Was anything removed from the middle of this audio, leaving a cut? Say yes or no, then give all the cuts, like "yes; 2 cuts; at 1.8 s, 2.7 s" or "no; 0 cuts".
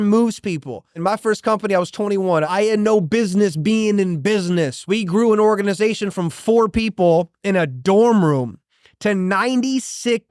yes; 3 cuts; at 1.0 s, 2.5 s, 4.8 s